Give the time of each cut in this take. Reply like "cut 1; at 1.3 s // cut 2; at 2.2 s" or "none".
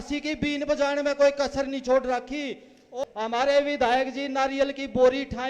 cut 1; at 2.9 s